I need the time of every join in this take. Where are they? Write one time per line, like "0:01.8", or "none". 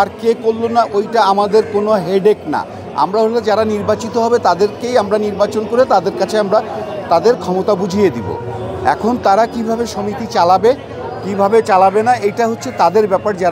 none